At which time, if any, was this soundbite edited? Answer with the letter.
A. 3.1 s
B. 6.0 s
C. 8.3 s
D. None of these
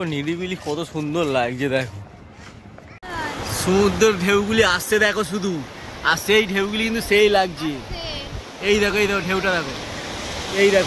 A